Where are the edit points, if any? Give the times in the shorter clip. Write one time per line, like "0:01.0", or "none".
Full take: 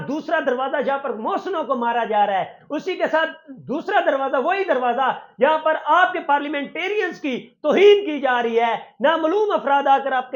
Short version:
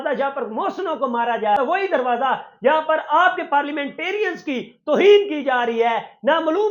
0:01.6